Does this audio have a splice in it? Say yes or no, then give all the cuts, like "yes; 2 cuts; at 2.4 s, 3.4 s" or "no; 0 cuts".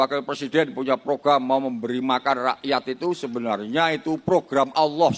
no; 0 cuts